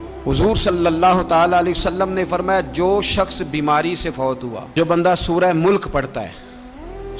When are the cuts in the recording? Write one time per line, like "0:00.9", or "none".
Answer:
0:04.7